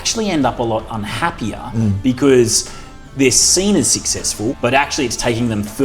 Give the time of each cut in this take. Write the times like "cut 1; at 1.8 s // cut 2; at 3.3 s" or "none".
cut 1; at 4.6 s